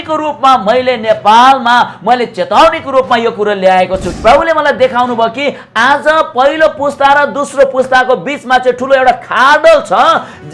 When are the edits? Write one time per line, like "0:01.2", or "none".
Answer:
0:04.1